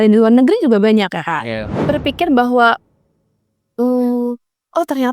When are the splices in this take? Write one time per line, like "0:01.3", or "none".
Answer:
0:01.7